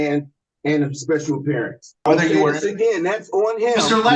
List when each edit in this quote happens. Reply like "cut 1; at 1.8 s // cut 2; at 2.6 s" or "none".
cut 1; at 2.1 s